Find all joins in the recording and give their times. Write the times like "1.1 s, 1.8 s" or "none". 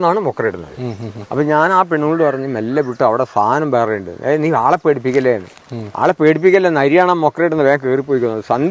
none